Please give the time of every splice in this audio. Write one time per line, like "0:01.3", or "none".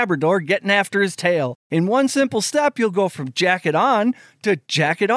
0:01.6